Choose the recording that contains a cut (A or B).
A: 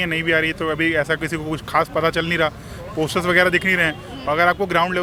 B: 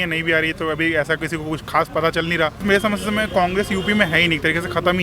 B